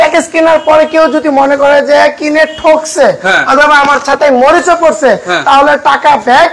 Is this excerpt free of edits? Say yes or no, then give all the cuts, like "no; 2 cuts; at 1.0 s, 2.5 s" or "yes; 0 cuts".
yes; 0 cuts